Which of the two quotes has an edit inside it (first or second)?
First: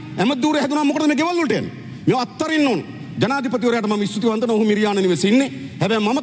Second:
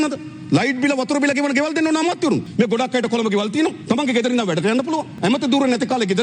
second